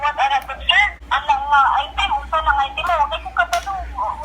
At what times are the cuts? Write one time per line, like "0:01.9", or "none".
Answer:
0:01.0